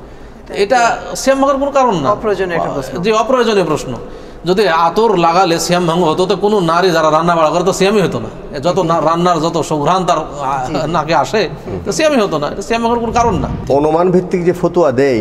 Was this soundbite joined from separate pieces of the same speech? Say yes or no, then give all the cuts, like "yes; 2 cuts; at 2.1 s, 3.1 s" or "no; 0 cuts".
yes; 1 cut; at 13.5 s